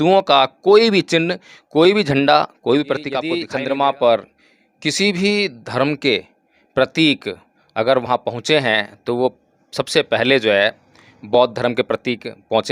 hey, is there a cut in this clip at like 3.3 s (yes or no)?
yes